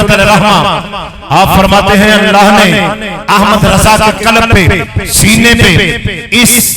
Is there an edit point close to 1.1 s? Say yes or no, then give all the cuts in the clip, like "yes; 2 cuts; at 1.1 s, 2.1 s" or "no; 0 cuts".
no; 0 cuts